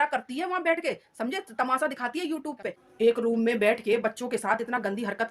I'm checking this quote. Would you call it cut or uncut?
cut